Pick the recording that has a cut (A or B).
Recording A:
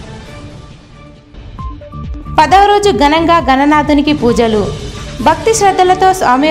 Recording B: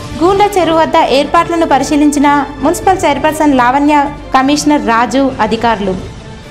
A